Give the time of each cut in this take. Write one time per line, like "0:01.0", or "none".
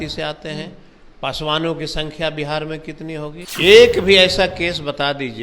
0:03.4